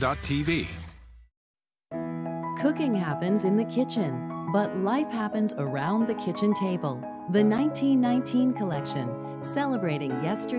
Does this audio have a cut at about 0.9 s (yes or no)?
yes